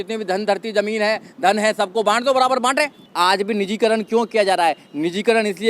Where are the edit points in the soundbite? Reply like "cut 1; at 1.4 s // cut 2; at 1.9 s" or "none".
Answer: cut 1; at 3.0 s

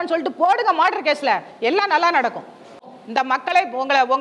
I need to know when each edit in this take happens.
cut 1; at 2.9 s

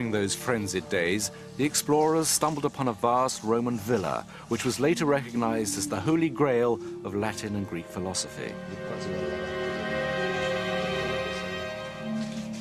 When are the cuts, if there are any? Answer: cut 1; at 6.5 s

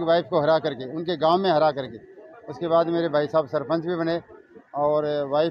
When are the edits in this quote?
none

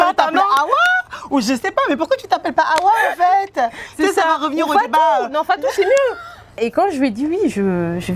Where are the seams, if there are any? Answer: cut 1; at 6.6 s

